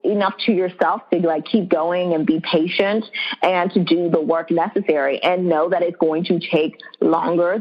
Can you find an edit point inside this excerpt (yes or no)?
no